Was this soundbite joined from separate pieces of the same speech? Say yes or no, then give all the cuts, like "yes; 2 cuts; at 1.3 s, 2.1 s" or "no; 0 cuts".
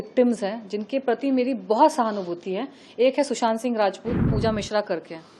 yes; 1 cut; at 4.3 s